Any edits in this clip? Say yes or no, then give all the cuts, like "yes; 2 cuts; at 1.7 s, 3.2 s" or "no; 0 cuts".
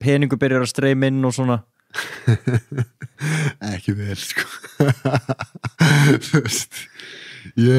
no; 0 cuts